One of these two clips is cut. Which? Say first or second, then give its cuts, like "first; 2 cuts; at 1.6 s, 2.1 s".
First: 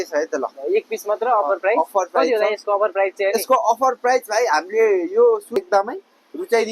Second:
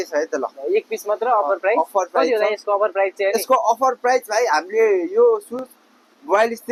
first; 1 cut; at 5.6 s